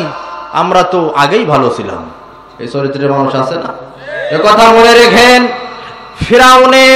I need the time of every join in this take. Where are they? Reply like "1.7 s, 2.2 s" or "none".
none